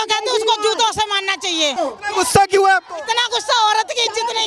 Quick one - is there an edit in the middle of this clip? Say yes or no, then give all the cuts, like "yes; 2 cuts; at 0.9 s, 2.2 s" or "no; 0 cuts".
yes; 1 cut; at 1.8 s